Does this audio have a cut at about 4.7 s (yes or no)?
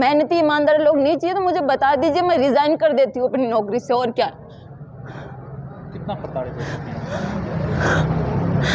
no